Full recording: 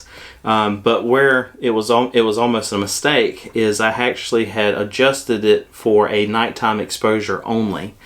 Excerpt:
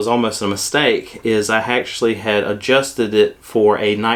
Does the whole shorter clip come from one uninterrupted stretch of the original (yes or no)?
yes